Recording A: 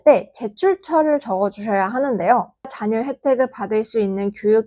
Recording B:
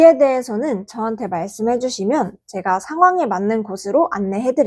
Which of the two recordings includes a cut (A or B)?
A